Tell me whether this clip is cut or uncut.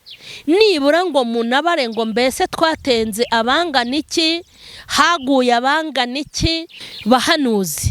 cut